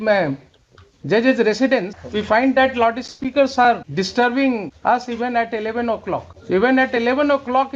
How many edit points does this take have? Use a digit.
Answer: 4